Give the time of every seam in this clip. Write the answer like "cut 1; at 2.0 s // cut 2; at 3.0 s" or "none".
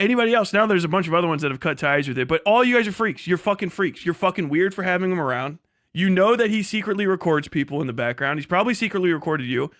none